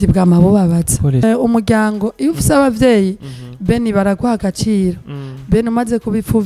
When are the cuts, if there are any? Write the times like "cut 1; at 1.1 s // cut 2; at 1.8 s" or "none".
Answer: cut 1; at 1.2 s

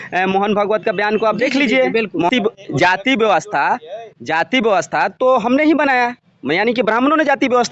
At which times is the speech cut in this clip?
cut 1; at 2.3 s

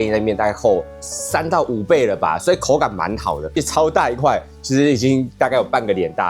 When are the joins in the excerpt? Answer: cut 1; at 3.5 s

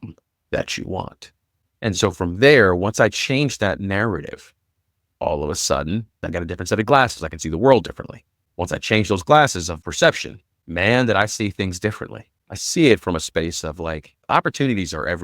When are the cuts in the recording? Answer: cut 1; at 6.2 s // cut 2; at 9.8 s // cut 3; at 14.2 s

